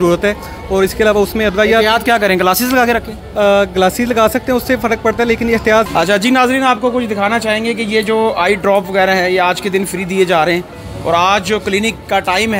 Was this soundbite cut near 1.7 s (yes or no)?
no